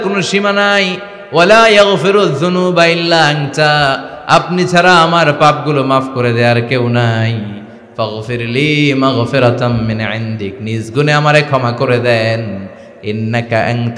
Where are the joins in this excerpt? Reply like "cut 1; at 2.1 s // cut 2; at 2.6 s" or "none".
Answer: none